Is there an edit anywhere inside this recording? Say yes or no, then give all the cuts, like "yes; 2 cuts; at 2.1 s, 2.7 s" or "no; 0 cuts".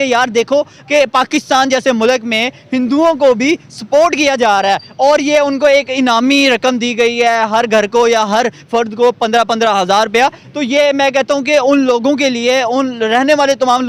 no; 0 cuts